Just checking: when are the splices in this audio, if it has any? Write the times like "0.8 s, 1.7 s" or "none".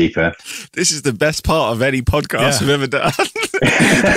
1.0 s